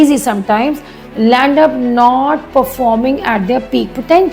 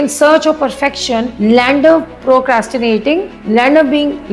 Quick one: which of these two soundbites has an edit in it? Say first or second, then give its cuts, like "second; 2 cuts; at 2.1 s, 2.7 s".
second; 2 cuts; at 1.3 s, 3.3 s